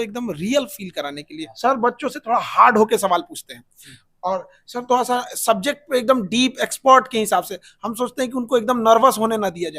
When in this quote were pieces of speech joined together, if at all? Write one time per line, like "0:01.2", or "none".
0:01.4

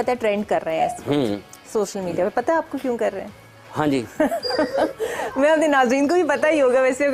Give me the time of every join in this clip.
none

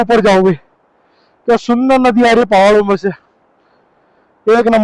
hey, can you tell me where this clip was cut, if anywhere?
none

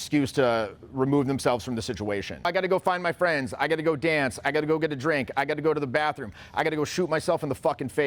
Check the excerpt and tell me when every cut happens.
0:02.5

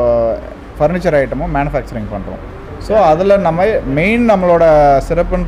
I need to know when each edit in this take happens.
none

